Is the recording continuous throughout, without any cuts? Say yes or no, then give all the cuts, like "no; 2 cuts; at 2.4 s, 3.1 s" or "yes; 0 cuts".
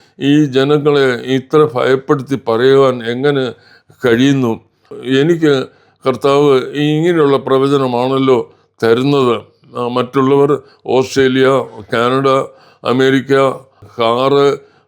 no; 2 cuts; at 4.9 s, 13.8 s